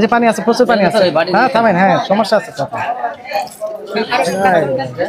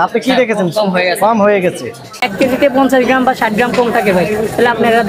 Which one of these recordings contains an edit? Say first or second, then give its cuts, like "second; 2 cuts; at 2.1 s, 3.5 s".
second; 1 cut; at 2.2 s